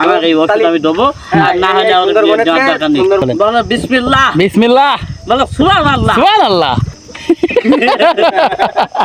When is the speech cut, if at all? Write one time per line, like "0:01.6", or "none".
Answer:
0:03.2
0:07.0